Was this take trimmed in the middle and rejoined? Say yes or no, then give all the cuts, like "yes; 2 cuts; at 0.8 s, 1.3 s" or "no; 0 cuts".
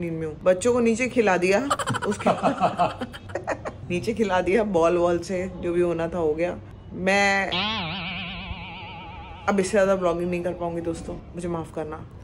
no; 0 cuts